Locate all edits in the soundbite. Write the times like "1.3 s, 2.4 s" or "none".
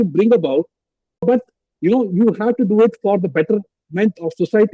1.2 s